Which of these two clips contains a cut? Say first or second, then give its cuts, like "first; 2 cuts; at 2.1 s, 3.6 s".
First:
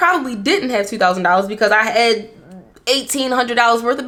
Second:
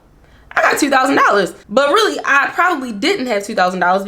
second; 1 cut; at 1.6 s